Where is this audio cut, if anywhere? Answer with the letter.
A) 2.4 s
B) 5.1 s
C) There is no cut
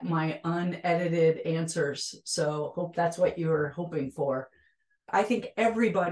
B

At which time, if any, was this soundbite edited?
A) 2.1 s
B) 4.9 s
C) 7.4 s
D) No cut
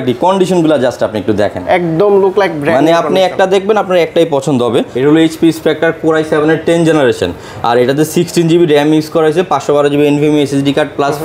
B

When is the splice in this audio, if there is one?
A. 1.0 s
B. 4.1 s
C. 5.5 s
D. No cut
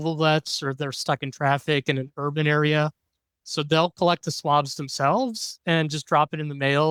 D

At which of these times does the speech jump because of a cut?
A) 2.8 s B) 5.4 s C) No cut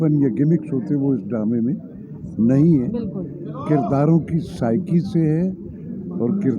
C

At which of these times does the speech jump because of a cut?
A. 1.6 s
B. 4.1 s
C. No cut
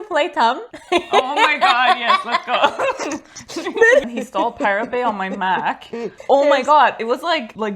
B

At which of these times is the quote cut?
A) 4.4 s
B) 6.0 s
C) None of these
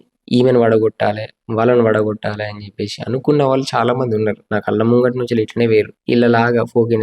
B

